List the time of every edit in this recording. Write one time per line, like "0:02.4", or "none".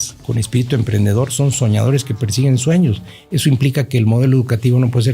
none

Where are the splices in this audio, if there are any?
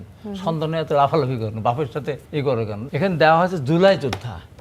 0:02.3

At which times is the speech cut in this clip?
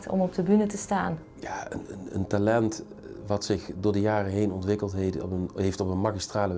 0:01.2

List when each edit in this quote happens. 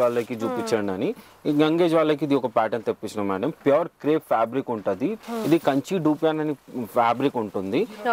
0:05.2

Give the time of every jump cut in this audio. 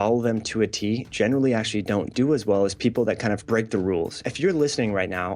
0:03.9

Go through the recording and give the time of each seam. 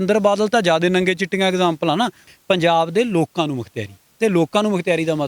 0:02.2

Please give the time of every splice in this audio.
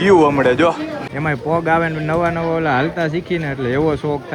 0:01.0

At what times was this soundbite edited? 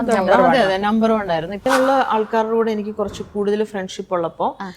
0:01.6

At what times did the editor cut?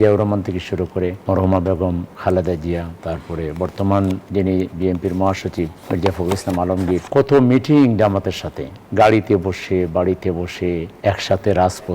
0:01.2
0:02.1
0:02.9
0:04.2
0:05.8
0:07.1
0:10.9

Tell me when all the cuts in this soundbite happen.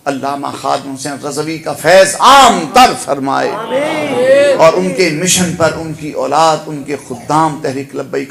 none

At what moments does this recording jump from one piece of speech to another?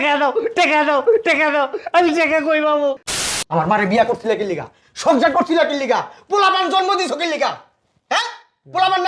0:03.1

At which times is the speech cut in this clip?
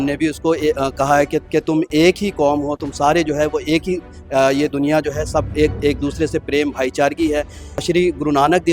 0:01.4
0:07.8

